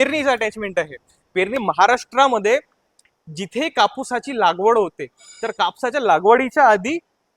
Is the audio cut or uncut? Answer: cut